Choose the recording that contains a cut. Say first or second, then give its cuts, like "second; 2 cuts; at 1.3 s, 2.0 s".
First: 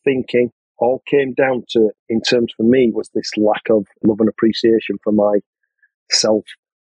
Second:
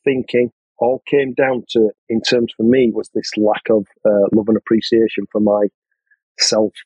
first; 1 cut; at 4.0 s